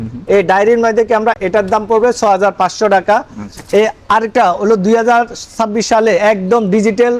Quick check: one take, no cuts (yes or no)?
yes